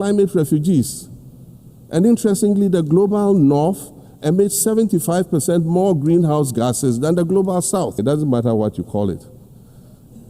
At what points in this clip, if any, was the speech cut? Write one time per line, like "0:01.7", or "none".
0:08.0